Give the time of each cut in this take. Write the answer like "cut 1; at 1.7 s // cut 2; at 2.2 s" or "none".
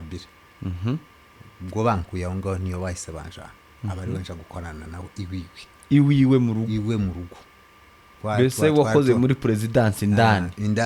none